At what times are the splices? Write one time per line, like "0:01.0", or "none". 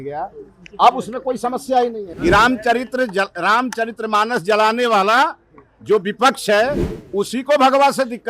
0:02.1